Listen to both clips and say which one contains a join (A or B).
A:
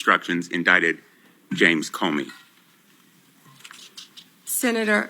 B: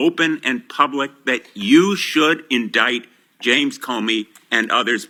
A